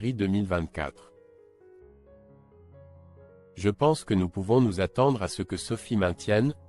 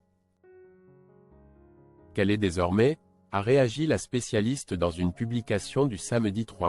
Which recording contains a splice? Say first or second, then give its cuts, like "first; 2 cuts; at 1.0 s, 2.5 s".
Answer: first; 2 cuts; at 1.3 s, 3.5 s